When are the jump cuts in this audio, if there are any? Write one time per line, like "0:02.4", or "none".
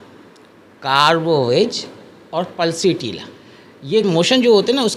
0:04.1